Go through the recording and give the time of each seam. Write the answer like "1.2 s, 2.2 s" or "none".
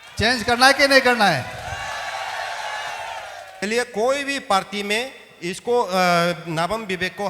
3.6 s